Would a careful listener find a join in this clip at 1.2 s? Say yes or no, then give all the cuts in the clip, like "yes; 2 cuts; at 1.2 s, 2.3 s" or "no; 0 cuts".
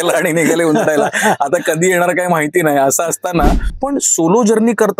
no; 1 cut; at 3.7 s